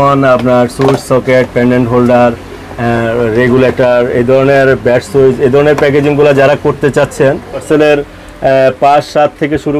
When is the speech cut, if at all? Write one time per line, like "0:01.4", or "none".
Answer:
0:07.6